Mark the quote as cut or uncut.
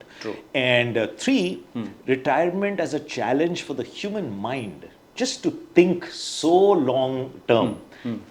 uncut